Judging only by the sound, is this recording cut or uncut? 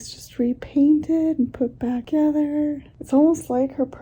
cut